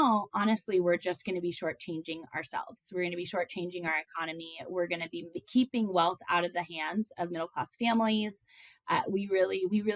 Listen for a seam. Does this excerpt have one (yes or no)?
no